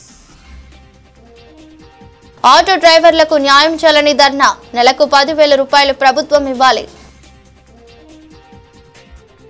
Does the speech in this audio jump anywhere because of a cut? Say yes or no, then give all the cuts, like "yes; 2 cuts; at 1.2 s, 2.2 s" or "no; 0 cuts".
no; 0 cuts